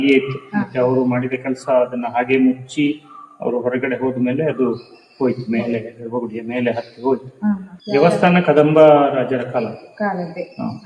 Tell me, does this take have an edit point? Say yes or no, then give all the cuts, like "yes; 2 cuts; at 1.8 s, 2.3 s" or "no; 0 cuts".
yes; 1 cut; at 7.7 s